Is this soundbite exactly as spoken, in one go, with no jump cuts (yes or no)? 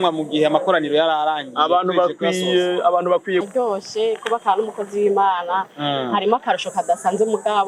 no